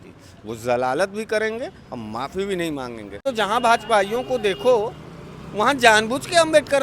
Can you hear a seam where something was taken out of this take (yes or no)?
yes